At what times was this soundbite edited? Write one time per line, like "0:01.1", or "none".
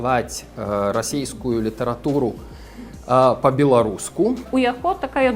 0:04.5